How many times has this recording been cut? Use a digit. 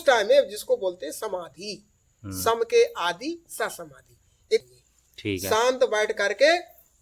1